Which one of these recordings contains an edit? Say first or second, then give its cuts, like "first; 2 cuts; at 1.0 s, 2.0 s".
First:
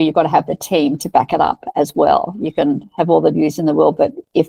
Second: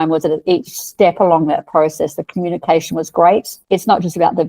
second; 1 cut; at 3.5 s